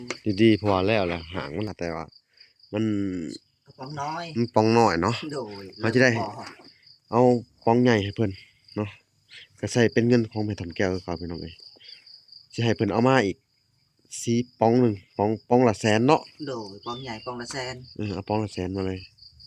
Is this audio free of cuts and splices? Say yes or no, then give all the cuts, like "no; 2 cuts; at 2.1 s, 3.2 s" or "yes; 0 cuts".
no; 1 cut; at 1.7 s